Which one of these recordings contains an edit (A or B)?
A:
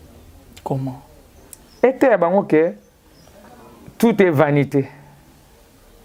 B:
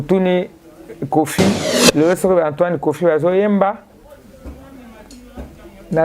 B